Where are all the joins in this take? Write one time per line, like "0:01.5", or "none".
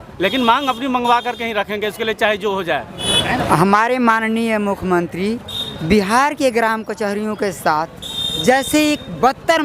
0:03.1